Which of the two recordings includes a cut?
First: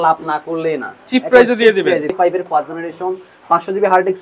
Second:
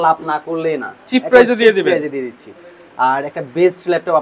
first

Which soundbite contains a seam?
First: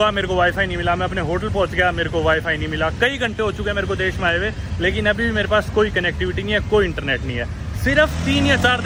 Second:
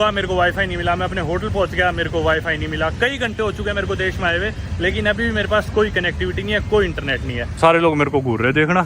second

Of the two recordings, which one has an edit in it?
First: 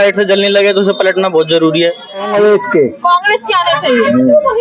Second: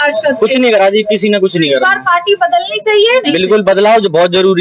first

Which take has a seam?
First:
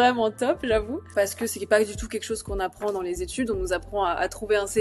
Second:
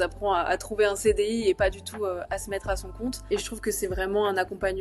first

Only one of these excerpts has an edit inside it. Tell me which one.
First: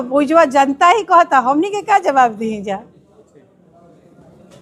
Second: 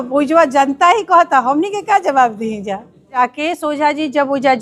second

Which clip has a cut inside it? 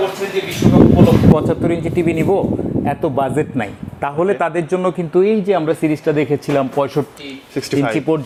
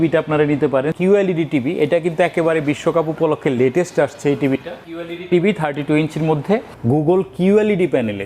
second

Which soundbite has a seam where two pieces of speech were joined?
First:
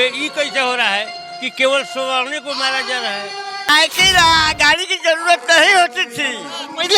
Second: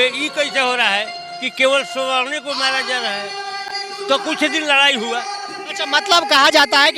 first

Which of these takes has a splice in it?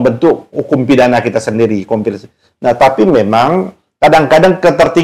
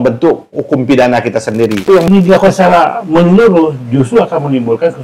second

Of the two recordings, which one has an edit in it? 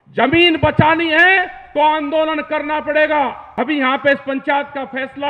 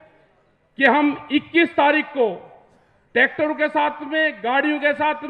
first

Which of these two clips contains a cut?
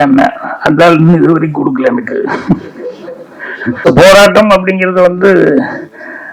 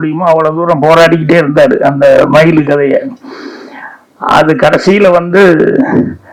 first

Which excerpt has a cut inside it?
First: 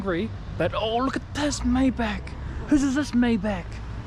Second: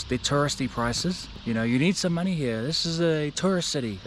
second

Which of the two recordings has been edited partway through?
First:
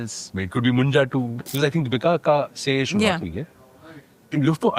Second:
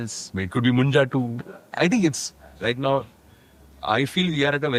first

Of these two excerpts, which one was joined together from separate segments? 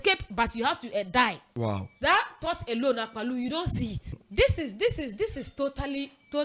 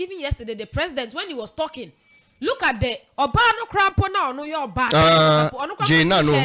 first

